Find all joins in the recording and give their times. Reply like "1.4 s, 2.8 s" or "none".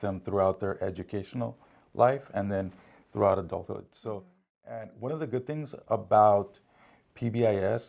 3.9 s

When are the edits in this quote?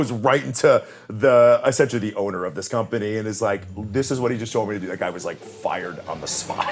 none

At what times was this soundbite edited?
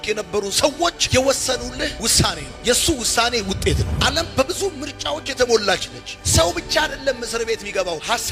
3.9 s

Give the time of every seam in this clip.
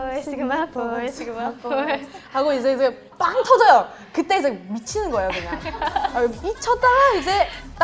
none

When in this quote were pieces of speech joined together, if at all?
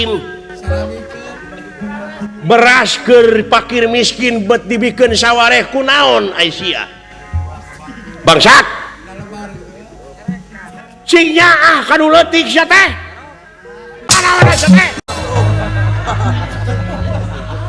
14.0 s, 15.0 s

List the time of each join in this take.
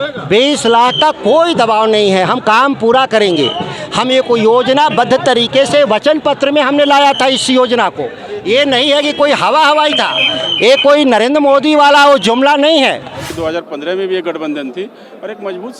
13.3 s

